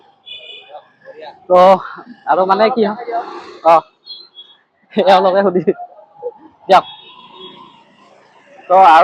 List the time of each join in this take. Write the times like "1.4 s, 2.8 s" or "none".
none